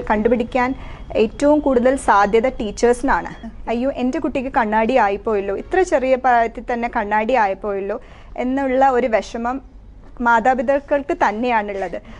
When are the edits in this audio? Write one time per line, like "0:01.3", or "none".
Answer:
0:03.4